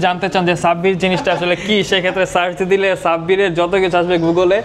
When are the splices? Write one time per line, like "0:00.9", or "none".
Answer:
none